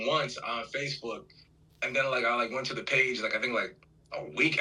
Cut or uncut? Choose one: uncut